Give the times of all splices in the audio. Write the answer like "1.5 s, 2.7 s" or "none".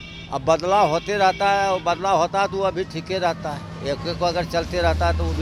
none